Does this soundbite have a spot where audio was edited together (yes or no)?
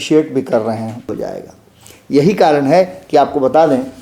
yes